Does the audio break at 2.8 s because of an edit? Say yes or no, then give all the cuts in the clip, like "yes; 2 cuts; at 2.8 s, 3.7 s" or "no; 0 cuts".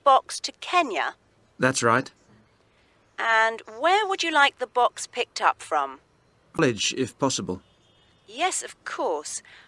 no; 1 cut; at 6.6 s